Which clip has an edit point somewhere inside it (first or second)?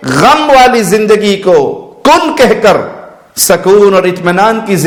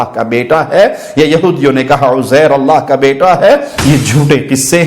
second